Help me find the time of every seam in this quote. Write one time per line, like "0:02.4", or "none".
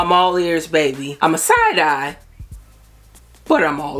0:01.1